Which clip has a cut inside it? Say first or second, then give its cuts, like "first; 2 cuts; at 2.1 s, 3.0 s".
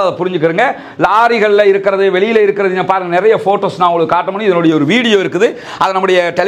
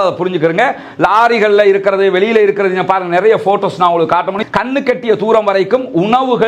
second; 1 cut; at 4.4 s